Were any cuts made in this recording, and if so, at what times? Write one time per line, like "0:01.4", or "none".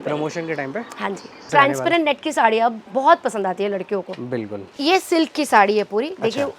0:01.5
0:04.7